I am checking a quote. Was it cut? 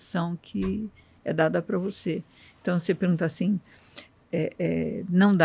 no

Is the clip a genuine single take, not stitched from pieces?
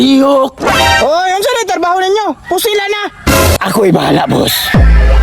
no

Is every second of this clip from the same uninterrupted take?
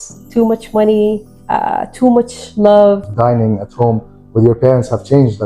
no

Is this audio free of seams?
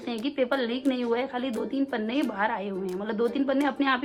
yes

